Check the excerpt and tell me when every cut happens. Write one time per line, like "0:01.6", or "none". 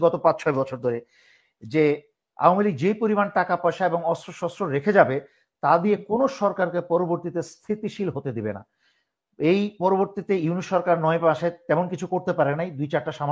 none